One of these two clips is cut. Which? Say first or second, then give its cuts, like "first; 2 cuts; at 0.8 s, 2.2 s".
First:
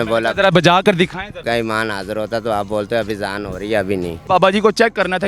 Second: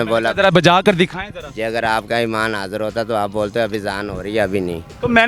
first; 2 cuts; at 1.4 s, 4.1 s